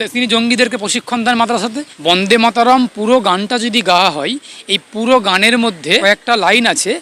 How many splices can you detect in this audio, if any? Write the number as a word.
two